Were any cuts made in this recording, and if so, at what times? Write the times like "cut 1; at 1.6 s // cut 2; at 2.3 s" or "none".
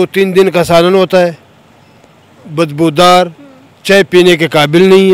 none